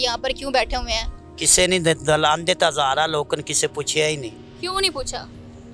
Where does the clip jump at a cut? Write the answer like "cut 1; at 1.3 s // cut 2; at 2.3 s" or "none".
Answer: none

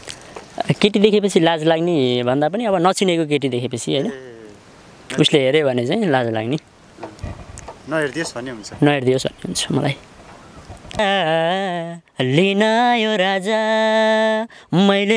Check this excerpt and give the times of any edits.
cut 1; at 11.0 s

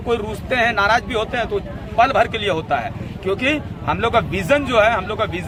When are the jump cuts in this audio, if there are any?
none

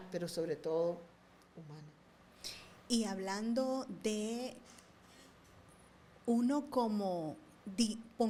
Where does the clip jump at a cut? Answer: none

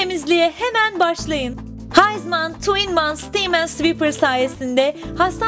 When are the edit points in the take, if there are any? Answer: none

